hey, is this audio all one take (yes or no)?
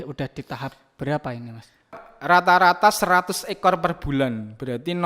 no